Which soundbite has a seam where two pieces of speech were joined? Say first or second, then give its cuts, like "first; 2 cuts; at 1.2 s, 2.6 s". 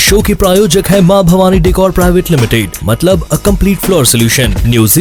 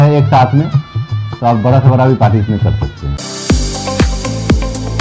second; 1 cut; at 3.1 s